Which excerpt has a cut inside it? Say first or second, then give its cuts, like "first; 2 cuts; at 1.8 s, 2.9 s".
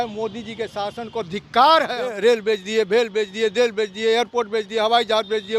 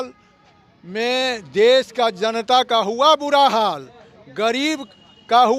first; 1 cut; at 2.2 s